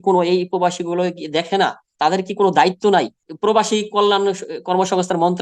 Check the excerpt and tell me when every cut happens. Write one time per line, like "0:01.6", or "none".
none